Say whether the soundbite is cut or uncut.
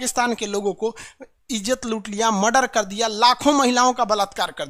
uncut